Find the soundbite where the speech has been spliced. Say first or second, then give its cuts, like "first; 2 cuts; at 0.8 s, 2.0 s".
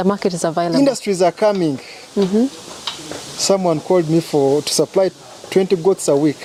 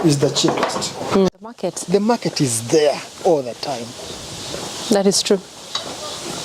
second; 1 cut; at 1.6 s